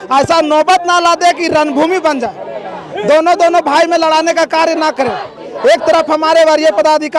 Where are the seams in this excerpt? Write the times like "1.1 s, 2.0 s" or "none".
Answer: none